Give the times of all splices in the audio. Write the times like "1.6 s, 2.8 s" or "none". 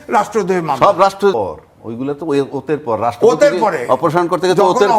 1.3 s